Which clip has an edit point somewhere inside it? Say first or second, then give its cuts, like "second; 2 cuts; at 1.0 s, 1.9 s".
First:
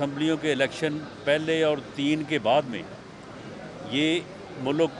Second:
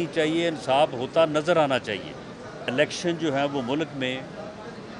second; 1 cut; at 2.7 s